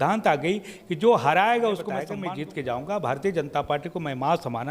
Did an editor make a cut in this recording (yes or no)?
yes